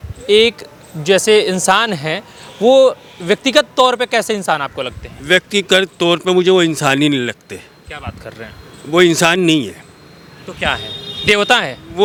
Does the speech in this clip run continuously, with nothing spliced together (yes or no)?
yes